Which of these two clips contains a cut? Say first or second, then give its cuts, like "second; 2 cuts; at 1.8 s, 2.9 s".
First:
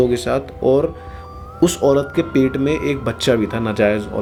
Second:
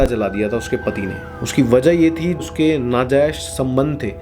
second; 1 cut; at 2.4 s